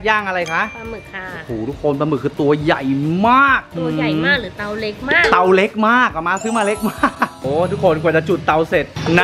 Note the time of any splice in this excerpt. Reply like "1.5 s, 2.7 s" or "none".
none